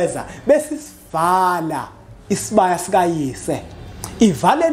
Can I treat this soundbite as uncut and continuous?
yes; 0 cuts

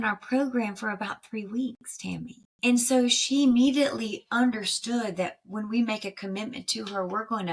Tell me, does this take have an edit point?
yes; 1 cut; at 2.4 s

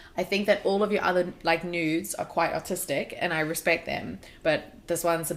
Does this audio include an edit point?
no; 0 cuts

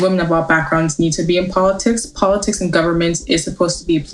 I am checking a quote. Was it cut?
no; 0 cuts

